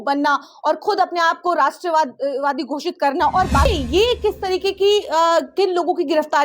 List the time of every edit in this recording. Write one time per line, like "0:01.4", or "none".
0:03.7